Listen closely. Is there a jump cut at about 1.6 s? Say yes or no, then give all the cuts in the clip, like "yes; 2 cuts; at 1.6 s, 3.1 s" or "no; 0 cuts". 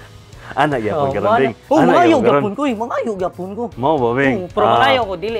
yes; 2 cuts; at 1.6 s, 4.5 s